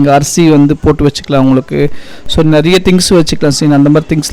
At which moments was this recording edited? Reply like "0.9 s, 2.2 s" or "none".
none

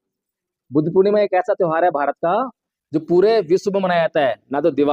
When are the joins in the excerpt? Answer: none

